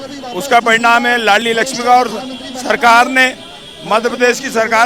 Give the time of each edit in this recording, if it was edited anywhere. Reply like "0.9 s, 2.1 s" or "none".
none